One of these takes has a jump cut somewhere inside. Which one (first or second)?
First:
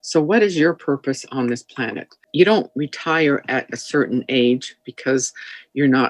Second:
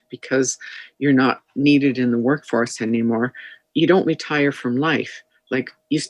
first